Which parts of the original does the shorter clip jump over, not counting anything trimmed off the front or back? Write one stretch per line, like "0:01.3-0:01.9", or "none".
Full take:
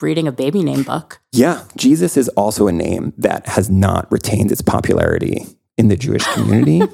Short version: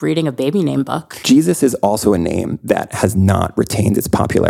0:01.1-0:01.7